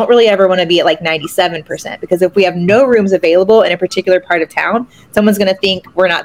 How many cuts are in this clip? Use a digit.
0